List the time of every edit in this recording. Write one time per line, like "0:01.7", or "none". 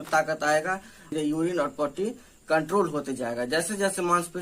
0:01.1